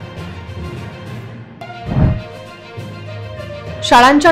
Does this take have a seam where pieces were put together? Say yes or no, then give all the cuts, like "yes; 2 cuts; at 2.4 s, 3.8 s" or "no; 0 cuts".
yes; 1 cut; at 1.0 s